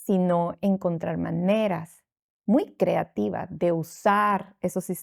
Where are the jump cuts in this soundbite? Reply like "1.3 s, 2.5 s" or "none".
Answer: none